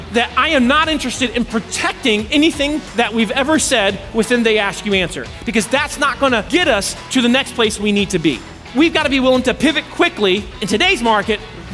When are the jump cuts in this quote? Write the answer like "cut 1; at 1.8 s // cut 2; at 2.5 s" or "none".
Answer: cut 1; at 2.8 s // cut 2; at 6.5 s // cut 3; at 8.7 s // cut 4; at 10.5 s